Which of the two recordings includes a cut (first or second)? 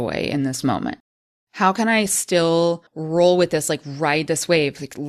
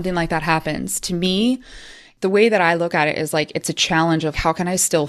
first